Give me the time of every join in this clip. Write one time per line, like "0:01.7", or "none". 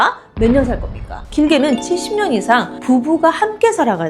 0:01.3